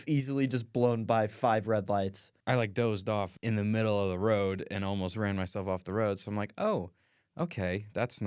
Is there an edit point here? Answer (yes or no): yes